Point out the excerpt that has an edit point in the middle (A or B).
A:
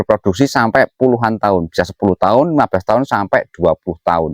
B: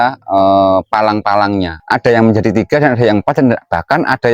B